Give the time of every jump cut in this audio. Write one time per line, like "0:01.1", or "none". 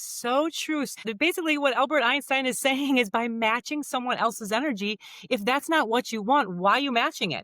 0:01.1